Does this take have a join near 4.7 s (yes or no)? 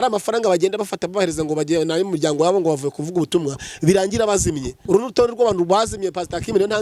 yes